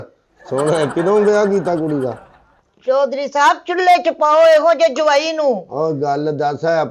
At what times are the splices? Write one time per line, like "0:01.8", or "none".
none